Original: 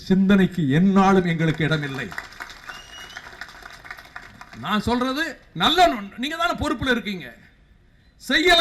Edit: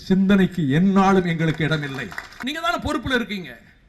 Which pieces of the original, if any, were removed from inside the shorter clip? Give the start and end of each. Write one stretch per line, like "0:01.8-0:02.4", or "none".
0:02.3-0:06.1